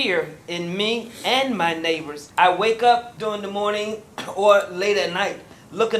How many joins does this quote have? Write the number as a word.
two